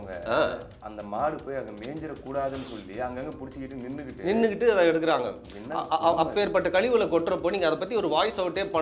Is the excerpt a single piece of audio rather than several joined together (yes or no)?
yes